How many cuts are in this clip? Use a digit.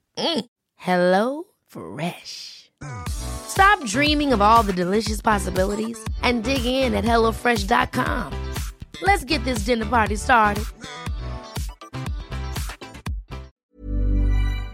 1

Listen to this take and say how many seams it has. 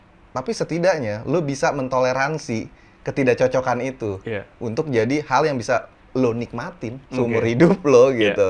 0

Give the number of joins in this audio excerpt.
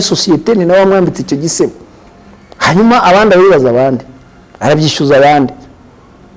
0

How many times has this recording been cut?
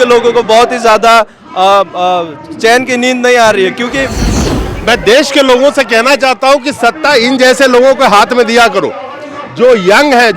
1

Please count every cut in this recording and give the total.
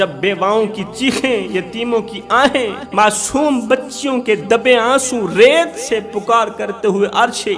1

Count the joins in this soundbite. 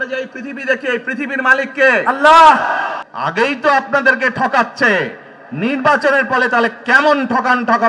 1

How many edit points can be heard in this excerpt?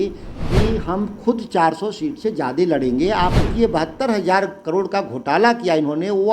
1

